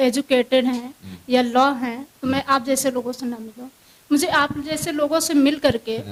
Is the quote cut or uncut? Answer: uncut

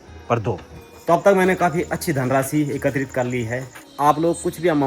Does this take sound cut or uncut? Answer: cut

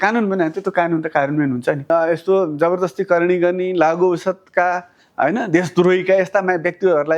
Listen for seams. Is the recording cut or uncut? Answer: cut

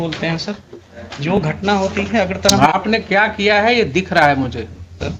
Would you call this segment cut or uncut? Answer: uncut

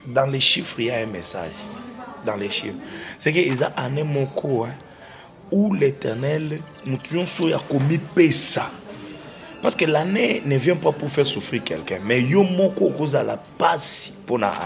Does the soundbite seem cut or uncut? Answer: uncut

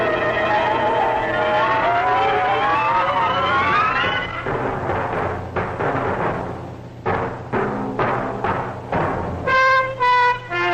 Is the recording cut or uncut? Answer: uncut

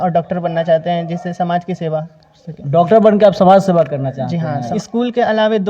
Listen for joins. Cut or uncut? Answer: cut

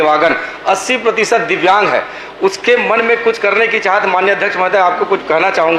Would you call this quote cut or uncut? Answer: uncut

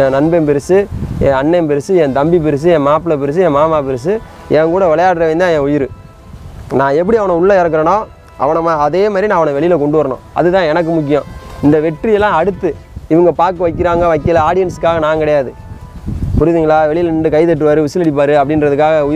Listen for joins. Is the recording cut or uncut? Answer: uncut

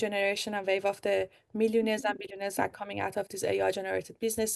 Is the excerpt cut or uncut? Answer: uncut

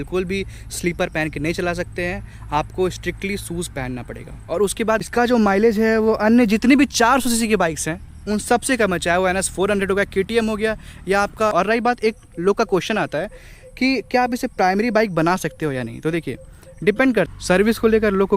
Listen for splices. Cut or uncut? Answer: cut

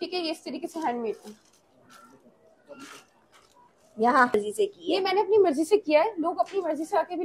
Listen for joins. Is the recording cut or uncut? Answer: cut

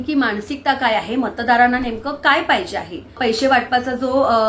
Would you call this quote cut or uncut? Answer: cut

